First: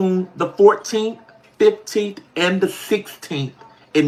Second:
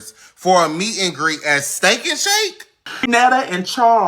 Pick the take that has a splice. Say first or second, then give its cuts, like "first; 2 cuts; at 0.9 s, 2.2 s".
second; 1 cut; at 3.1 s